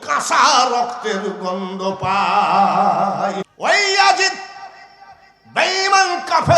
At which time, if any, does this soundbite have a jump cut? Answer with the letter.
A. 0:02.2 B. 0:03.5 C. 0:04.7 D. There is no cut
B